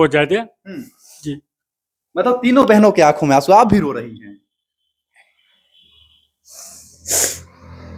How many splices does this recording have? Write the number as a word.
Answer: zero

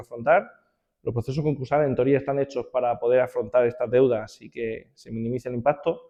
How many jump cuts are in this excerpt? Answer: zero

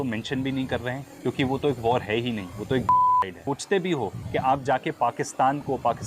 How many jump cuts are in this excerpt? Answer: one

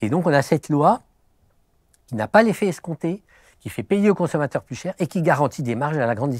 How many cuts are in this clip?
zero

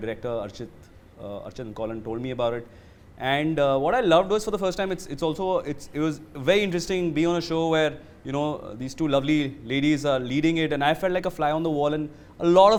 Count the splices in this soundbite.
zero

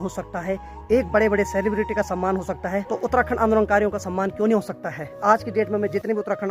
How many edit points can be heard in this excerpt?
two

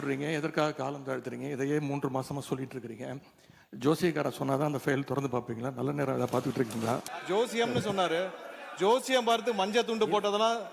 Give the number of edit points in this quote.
one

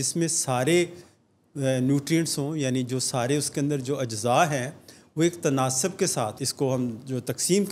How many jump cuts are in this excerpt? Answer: one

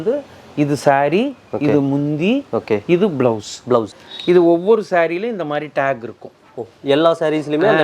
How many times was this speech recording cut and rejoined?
one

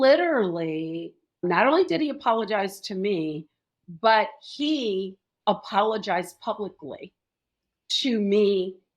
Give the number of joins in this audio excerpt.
one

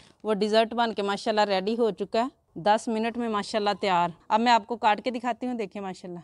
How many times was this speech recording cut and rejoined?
two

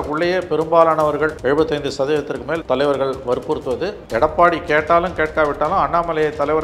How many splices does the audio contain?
three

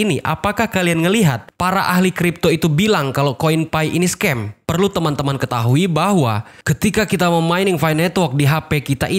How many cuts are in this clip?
one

